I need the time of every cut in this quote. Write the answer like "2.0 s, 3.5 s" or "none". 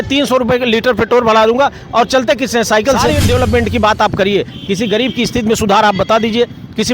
3.1 s